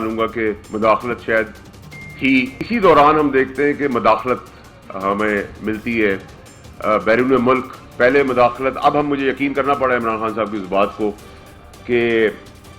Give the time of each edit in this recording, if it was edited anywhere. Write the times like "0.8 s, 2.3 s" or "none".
2.6 s

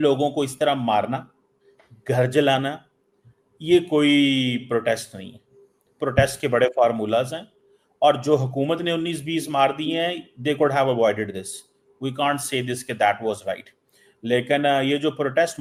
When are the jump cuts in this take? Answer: none

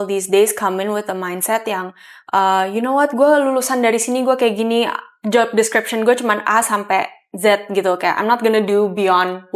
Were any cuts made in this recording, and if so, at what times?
none

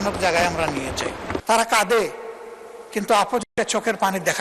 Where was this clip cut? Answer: 1.4 s

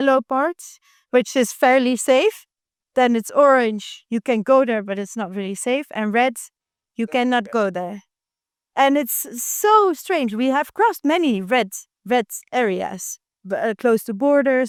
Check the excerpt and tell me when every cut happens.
none

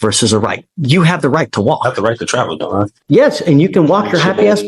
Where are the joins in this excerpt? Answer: 3.0 s

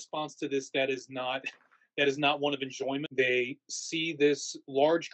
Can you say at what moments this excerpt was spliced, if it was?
3.1 s

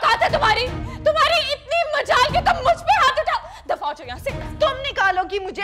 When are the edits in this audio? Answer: none

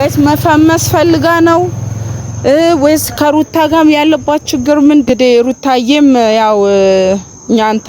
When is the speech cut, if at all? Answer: 5.1 s

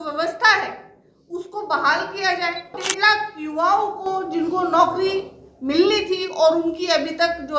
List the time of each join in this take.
2.8 s

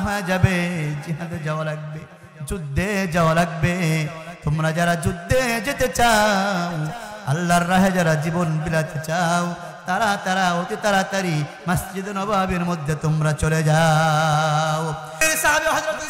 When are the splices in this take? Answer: 15.2 s

